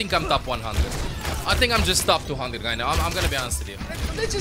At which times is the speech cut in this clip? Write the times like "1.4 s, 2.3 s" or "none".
none